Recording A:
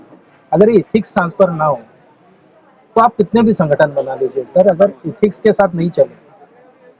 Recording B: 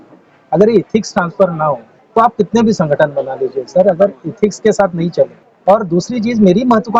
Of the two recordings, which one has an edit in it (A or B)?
B